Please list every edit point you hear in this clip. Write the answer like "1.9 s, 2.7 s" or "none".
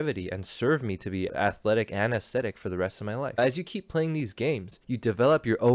1.3 s, 3.4 s, 4.7 s